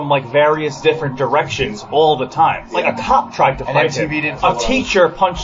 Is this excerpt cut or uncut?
cut